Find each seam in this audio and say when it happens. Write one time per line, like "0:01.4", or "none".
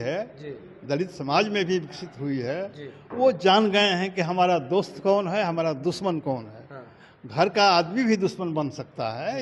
none

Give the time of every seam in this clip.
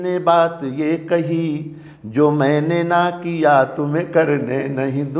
none

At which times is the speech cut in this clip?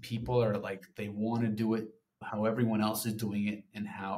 none

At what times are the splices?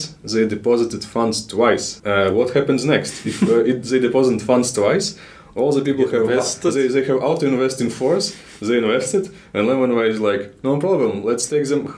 0:01.9

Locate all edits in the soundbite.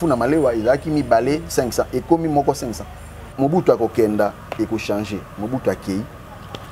0:03.3

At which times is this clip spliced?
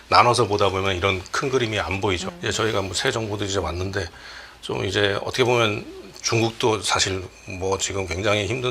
0:02.3

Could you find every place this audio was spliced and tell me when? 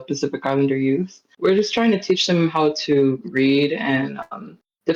0:01.3

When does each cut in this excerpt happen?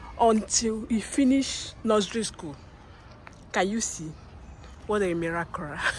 none

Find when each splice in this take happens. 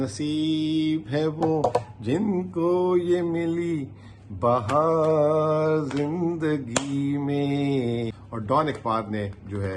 0:08.2

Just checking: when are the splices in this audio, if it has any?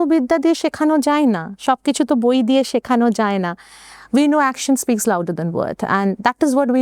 none

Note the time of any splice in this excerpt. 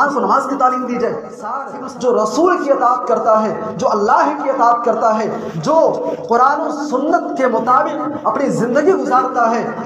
0:01.7

